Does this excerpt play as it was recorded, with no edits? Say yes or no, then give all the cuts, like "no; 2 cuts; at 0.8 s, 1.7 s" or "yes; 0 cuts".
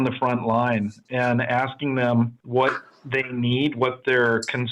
no; 1 cut; at 2.4 s